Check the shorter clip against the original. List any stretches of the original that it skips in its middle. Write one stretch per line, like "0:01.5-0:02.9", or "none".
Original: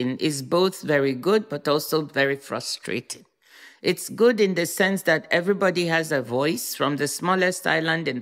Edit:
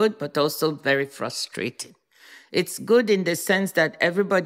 none